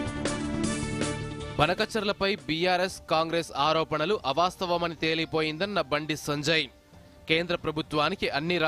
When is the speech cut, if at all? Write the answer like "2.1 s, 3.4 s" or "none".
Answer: 1.4 s